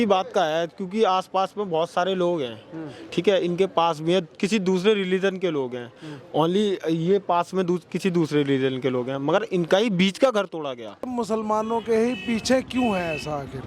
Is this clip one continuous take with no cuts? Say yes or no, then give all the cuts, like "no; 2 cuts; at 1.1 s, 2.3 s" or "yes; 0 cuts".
no; 1 cut; at 11.1 s